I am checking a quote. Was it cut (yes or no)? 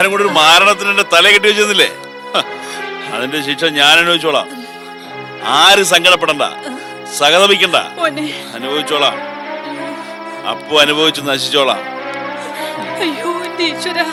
no